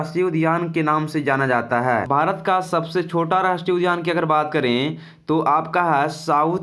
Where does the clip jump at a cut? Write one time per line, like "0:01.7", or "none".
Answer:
0:02.1